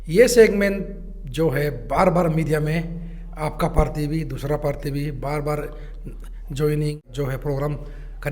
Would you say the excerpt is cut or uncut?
cut